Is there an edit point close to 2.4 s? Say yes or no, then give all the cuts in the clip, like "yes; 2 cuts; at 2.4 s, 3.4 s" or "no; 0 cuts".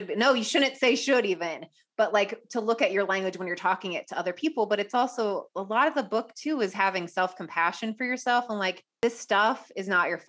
no; 1 cut; at 8.9 s